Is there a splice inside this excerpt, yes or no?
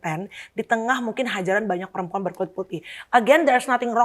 no